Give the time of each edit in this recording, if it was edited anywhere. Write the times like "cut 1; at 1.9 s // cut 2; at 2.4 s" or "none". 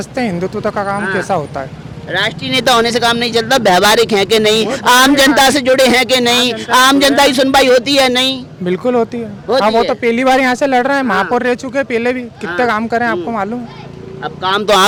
none